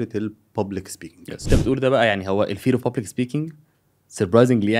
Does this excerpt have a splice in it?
yes; 1 cut; at 1.5 s

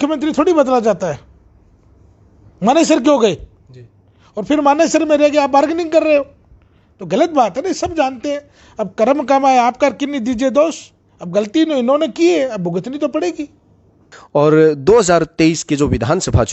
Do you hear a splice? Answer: no; 0 cuts

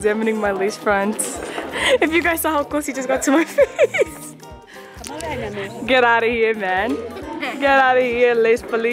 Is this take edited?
no; 0 cuts

